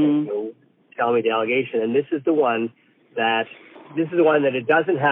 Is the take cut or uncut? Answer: cut